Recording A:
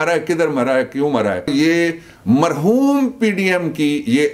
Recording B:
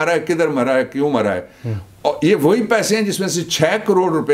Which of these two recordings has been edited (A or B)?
A